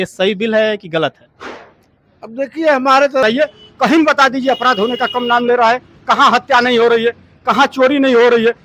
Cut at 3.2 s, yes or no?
yes